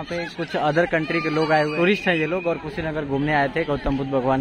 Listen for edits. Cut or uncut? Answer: cut